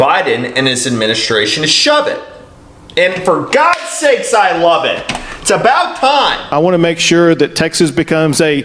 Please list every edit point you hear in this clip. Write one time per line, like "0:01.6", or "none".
0:06.4